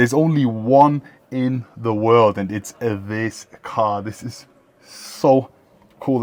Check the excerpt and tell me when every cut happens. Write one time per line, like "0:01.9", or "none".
none